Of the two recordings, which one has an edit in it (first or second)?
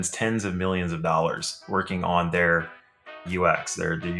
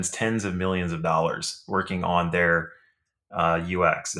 first